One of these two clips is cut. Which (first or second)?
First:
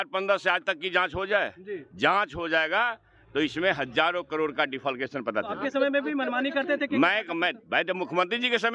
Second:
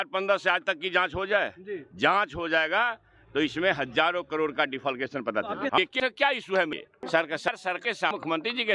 second